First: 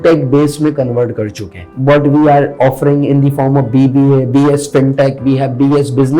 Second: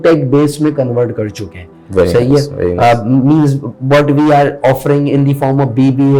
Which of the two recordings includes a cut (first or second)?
first